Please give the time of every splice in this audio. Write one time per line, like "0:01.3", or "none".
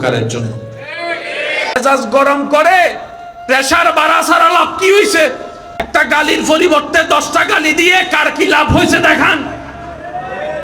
0:01.7
0:05.8